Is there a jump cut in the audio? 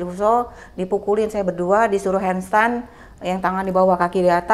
no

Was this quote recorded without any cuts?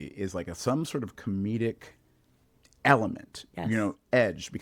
yes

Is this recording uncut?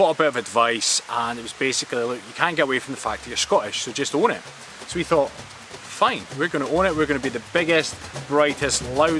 yes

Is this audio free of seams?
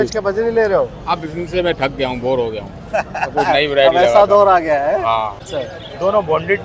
no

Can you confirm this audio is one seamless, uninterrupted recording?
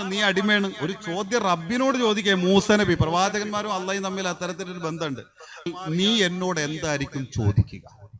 no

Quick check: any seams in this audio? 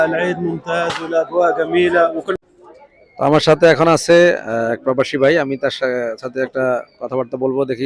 yes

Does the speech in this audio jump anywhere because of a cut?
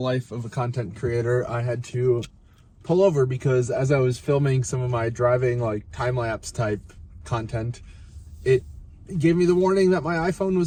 no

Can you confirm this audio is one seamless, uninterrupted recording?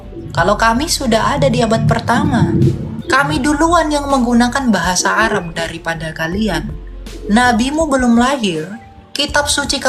yes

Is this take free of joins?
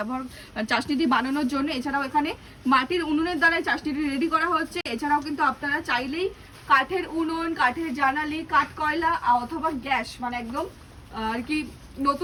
yes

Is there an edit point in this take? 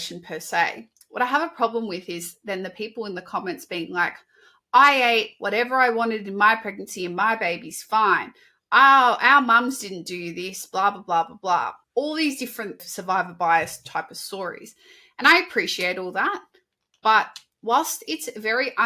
yes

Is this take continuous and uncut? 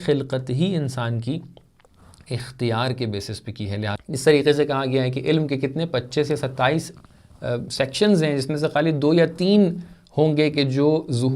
no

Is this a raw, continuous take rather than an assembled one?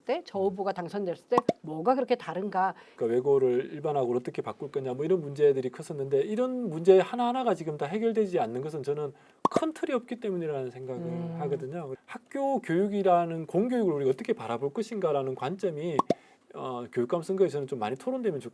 no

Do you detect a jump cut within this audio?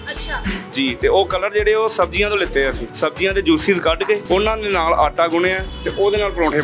yes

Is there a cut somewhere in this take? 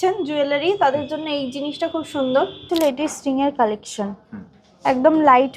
yes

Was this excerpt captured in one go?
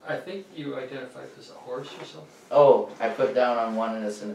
yes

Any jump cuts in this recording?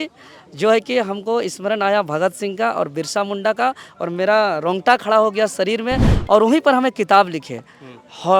yes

